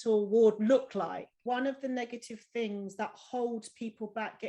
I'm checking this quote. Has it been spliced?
yes; 1 cut; at 1.4 s

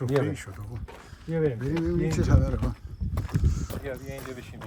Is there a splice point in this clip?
no; 0 cuts

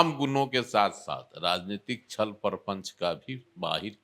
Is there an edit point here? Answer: no; 0 cuts

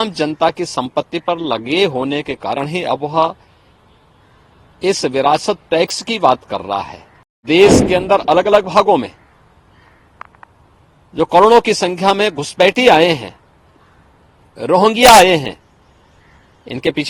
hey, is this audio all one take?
no; 1 cut; at 7.4 s

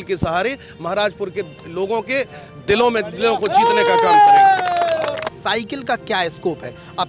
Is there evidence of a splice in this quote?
yes; 1 cut; at 5.2 s

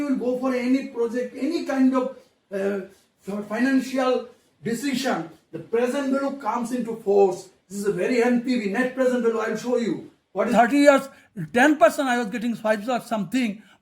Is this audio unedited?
no; 1 cut; at 10.5 s

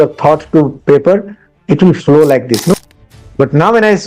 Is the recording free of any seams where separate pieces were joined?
no; 1 cut; at 2.7 s

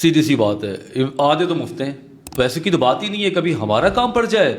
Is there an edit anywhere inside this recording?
yes; 1 cut; at 2.2 s

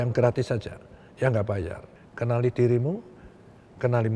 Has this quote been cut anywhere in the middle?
yes; 1 cut; at 1.9 s

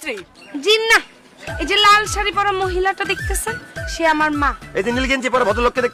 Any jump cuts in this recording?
no; 0 cuts

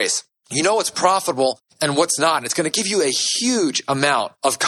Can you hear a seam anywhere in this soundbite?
no; 0 cuts

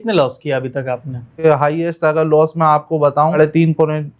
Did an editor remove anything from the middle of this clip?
yes; 2 cuts; at 1.4 s, 3.4 s

